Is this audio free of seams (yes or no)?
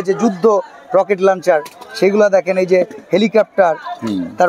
yes